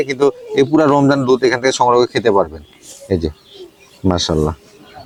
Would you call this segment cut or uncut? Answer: uncut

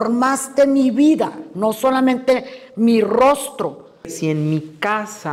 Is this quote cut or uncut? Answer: cut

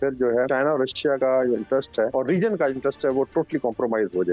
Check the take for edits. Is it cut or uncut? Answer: cut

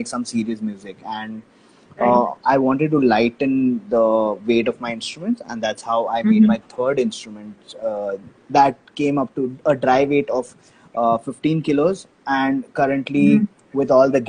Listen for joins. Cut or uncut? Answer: uncut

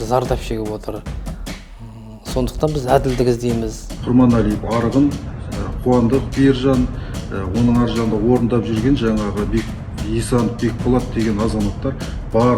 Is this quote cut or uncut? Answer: cut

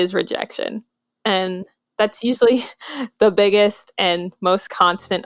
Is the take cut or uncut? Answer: uncut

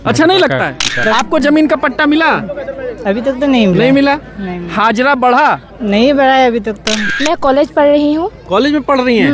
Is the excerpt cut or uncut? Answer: cut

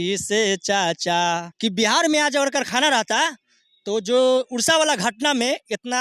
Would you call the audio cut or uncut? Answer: cut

